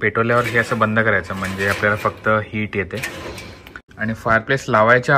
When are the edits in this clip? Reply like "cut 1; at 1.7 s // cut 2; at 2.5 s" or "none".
none